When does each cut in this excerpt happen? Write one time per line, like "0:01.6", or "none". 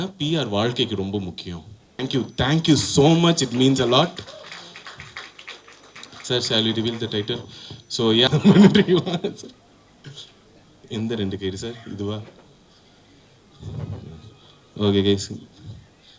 0:01.9
0:08.3